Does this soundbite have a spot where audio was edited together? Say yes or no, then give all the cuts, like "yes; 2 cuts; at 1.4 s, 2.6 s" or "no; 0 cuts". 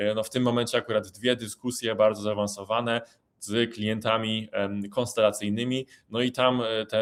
no; 0 cuts